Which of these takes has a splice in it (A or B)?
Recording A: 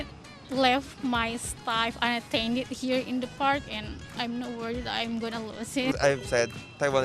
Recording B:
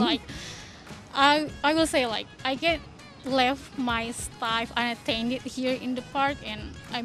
A